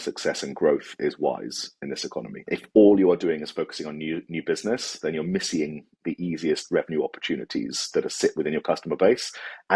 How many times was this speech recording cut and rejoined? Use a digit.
1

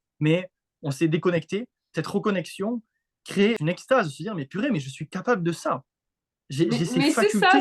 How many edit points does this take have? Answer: 2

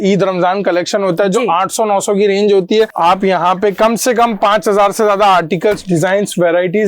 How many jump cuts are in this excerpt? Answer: 1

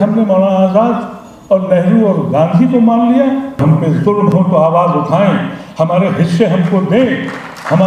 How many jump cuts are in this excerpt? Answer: 1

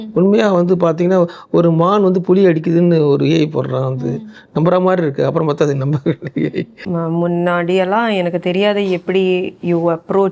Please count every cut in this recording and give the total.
1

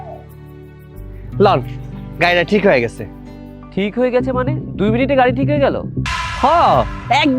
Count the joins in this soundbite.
1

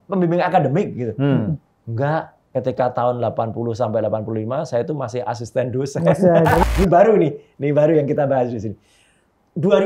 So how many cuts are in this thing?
1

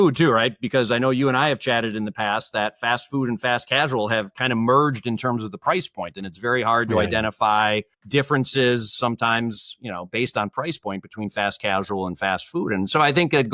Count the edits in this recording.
1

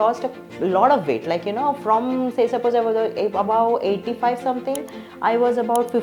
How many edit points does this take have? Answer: 0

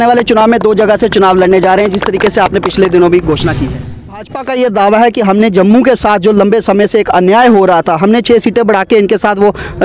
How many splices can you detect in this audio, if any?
1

